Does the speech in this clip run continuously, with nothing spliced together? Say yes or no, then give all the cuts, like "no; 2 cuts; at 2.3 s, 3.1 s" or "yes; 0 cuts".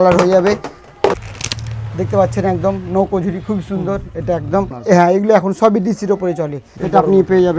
no; 3 cuts; at 1.1 s, 4.7 s, 6.6 s